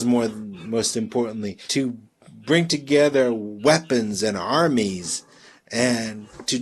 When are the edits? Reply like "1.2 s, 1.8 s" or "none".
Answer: 1.6 s

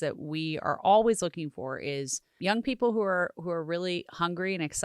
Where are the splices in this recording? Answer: 2.3 s

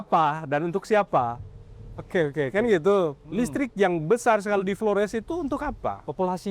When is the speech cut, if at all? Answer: none

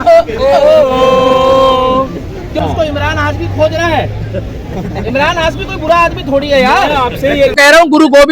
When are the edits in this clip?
2.6 s, 7.5 s

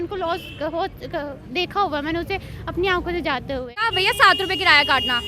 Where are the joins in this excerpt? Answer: 3.9 s

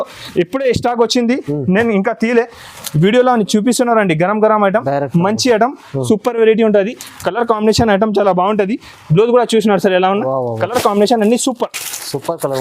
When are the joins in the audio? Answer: 10.6 s

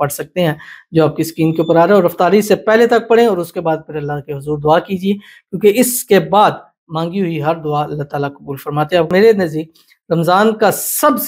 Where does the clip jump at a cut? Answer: 9.1 s

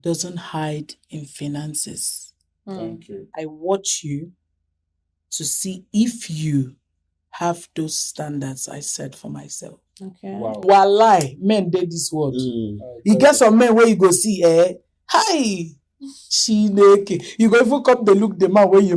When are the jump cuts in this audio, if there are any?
3.3 s, 10.6 s

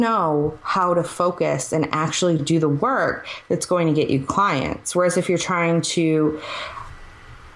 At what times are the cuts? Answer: none

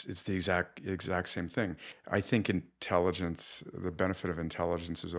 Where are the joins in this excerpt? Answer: 1.9 s

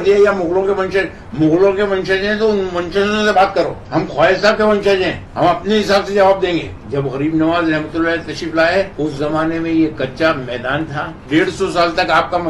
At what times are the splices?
3.8 s, 5.2 s, 6.8 s, 8.9 s, 11.2 s

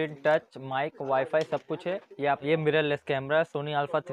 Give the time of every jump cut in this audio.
2.4 s

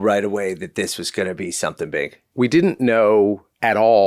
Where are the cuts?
2.2 s

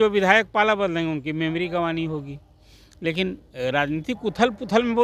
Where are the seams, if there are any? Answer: none

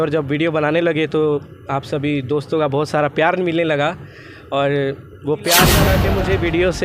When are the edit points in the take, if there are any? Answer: 5.9 s

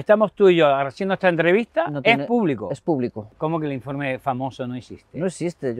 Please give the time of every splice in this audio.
3.3 s

